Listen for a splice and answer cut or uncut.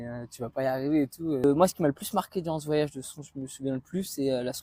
uncut